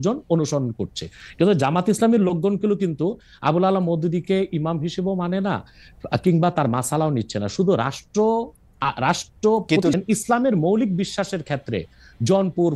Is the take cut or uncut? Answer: cut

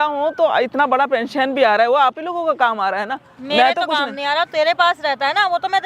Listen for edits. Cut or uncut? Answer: uncut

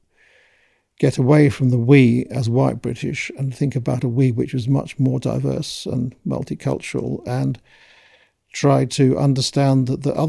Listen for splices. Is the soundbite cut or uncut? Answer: uncut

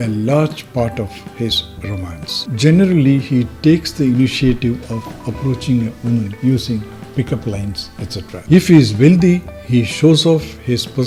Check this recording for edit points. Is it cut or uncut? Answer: uncut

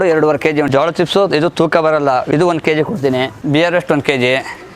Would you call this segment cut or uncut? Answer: cut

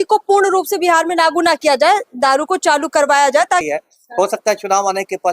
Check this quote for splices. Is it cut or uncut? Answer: cut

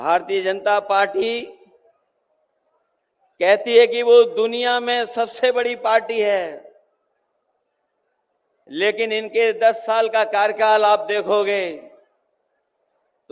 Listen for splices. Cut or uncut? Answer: uncut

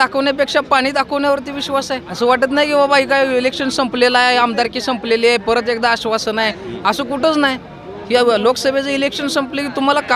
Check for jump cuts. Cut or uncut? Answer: cut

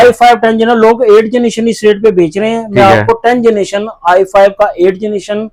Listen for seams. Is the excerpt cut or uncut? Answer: uncut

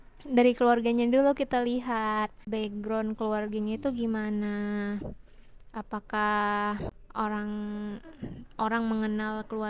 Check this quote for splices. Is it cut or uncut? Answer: cut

